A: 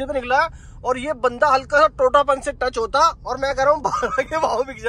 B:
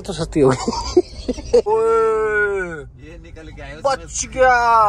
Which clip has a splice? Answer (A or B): B